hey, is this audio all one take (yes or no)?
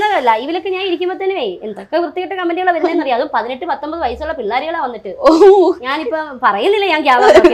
yes